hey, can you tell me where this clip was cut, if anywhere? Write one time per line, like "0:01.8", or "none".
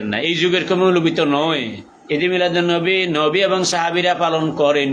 none